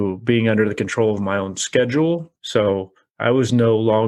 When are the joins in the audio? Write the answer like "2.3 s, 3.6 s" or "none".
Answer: 2.3 s